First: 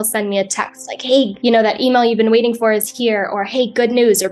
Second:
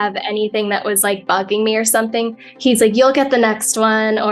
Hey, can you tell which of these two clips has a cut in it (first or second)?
first